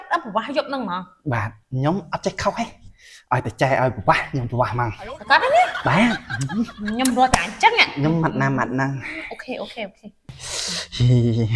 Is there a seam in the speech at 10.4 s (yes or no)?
yes